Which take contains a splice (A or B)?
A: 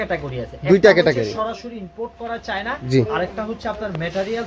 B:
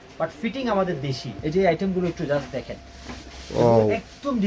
B